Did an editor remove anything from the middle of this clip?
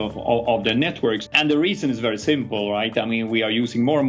yes; 1 cut; at 1.3 s

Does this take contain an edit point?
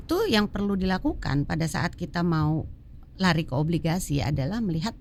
no; 0 cuts

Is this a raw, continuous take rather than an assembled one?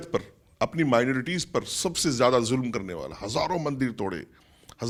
yes; 0 cuts

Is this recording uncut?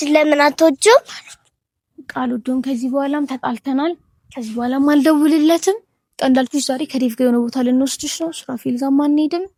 yes; 0 cuts

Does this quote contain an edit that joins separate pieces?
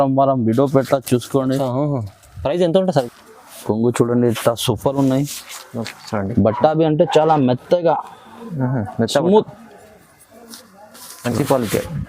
yes; 1 cut; at 3.1 s

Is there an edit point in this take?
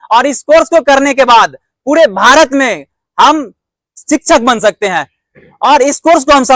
no; 0 cuts

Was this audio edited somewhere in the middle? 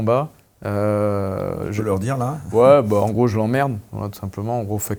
no; 0 cuts

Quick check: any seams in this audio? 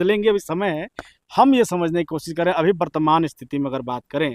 no; 0 cuts

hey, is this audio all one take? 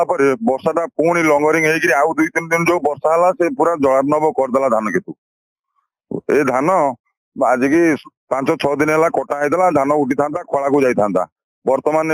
yes; 0 cuts

